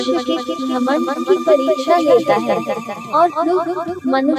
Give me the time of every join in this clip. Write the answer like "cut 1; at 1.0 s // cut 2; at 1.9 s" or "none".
none